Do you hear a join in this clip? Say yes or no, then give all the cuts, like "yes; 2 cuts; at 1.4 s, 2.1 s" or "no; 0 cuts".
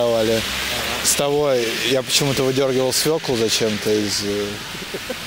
no; 0 cuts